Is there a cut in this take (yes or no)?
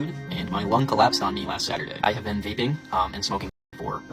no